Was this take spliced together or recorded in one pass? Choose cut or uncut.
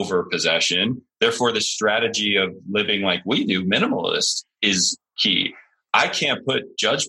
uncut